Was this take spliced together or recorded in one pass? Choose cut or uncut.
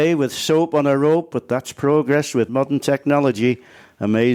uncut